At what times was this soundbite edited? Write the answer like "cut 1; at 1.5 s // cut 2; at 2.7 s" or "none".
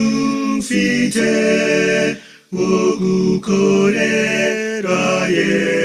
cut 1; at 4.7 s